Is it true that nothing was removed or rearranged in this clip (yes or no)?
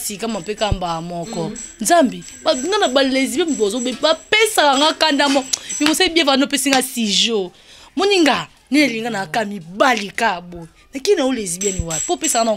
yes